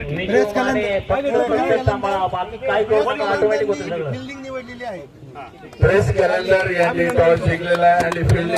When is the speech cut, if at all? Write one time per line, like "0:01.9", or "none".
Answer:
none